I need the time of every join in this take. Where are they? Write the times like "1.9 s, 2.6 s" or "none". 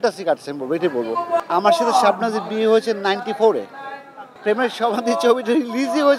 1.4 s, 4.4 s